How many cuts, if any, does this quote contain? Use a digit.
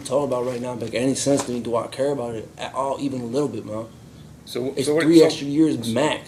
0